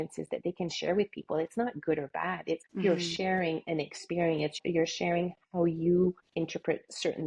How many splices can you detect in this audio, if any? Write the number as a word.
three